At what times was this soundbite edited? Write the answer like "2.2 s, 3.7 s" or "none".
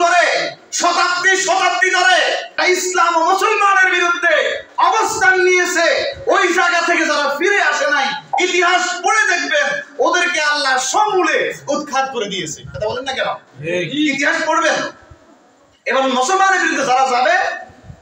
2.5 s